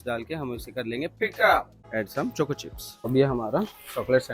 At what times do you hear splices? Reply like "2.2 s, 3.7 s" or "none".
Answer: 1.8 s